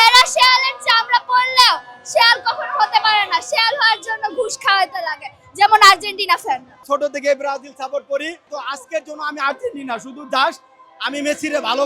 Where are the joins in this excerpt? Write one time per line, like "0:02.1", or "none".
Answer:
0:06.7
0:08.6